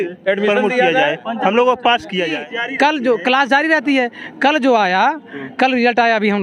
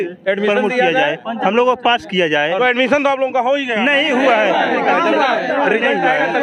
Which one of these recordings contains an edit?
first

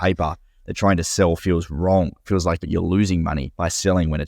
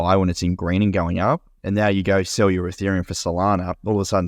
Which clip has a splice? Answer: first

